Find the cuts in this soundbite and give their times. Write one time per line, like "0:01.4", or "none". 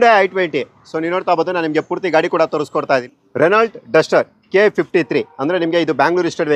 0:03.1